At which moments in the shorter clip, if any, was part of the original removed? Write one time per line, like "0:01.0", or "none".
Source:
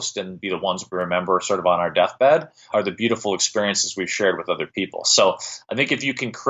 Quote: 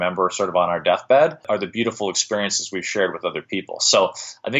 0:01.4